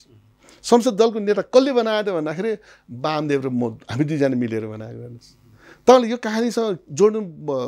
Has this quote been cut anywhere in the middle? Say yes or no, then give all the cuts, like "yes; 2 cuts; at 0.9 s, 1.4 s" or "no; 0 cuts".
no; 0 cuts